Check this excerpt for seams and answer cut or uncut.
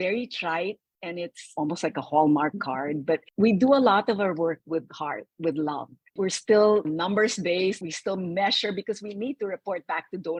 uncut